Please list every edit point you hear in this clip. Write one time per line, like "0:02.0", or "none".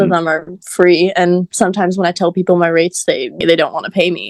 0:03.4